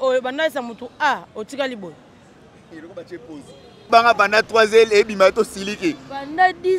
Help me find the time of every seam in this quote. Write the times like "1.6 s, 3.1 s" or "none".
3.8 s